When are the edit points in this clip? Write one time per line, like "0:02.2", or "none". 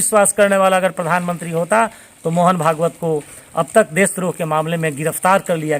none